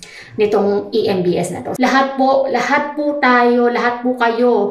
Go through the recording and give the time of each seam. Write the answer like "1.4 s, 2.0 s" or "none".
1.6 s